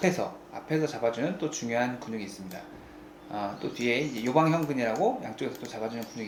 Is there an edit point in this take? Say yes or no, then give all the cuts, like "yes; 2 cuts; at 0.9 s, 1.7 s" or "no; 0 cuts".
no; 0 cuts